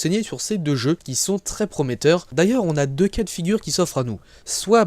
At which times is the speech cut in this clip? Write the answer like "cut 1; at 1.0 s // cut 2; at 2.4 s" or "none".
cut 1; at 2.2 s